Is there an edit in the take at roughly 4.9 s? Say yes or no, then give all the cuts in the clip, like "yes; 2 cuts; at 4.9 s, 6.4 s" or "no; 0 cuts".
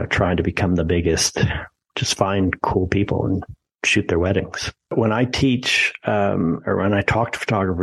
yes; 1 cut; at 4.9 s